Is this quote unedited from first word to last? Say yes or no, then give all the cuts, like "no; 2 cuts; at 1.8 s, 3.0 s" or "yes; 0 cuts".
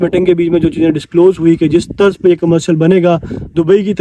yes; 0 cuts